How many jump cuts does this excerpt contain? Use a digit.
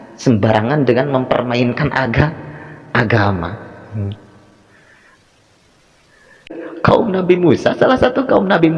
1